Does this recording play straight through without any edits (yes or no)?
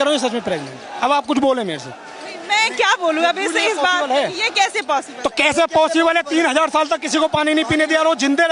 yes